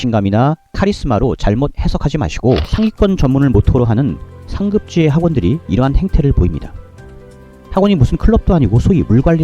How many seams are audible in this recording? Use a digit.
1